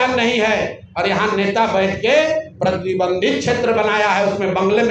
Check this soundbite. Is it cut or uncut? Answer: uncut